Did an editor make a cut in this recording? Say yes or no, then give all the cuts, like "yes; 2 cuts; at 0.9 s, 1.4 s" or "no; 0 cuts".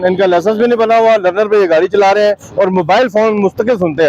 no; 0 cuts